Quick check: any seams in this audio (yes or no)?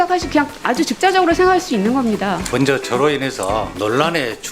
yes